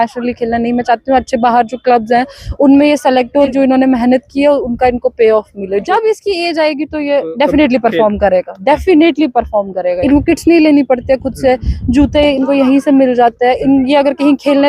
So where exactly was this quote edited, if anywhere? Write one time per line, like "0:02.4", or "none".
0:03.5
0:05.8
0:10.0